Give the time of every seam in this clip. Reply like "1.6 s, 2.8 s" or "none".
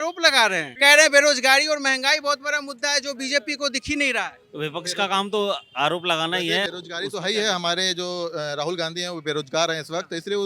6.7 s